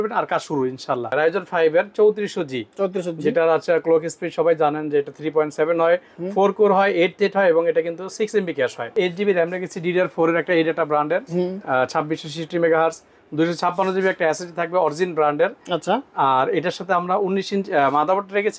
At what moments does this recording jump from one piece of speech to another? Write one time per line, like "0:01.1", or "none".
0:01.1
0:08.9